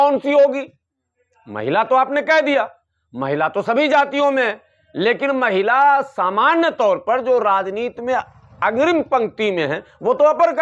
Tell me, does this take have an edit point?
no; 0 cuts

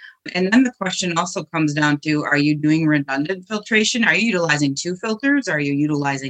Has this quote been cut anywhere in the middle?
no; 0 cuts

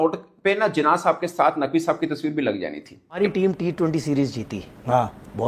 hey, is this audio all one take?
no; 1 cut; at 3.2 s

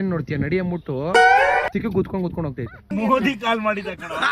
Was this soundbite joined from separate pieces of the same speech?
yes; 1 cut; at 2.9 s

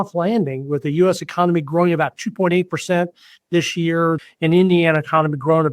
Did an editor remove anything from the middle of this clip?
yes; 1 cut; at 4.2 s

